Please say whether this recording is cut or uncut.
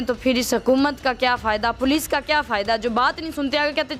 uncut